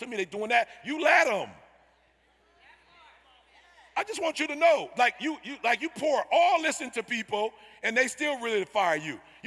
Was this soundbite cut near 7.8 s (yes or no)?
no